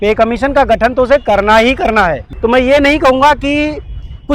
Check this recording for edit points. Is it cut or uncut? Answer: cut